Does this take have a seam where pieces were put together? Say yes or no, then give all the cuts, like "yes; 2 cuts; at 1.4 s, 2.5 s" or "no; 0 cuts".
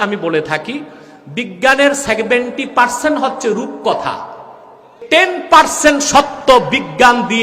yes; 1 cut; at 5.0 s